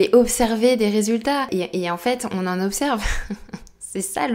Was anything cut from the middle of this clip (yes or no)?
no